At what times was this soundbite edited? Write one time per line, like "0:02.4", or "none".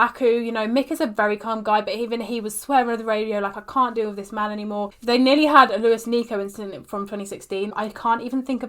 0:04.9
0:07.7